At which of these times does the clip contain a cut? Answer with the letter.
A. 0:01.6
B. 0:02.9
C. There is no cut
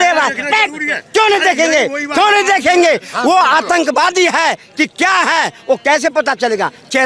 C